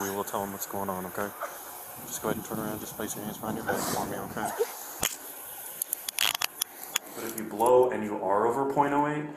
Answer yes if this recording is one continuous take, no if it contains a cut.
no